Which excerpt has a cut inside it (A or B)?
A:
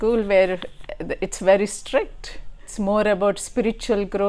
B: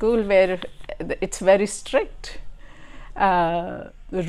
A